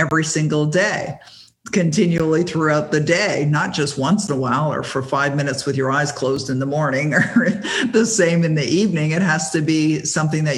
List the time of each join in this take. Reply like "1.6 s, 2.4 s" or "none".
none